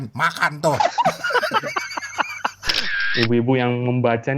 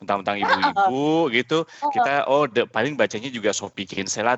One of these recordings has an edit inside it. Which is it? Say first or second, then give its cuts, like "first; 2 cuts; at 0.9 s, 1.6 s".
first; 1 cut; at 2.9 s